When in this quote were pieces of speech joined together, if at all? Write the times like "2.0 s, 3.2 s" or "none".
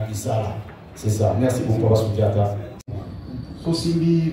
2.7 s